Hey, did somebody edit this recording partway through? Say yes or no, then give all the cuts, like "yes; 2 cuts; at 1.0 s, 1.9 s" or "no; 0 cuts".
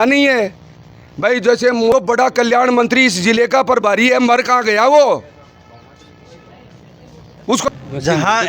yes; 2 cuts; at 1.9 s, 7.7 s